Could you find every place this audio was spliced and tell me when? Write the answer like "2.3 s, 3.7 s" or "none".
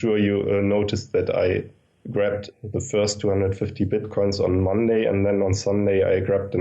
2.4 s